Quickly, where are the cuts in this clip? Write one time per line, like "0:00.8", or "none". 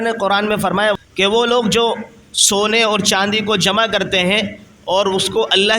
0:01.0

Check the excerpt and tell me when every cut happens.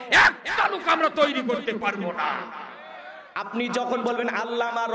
0:03.4

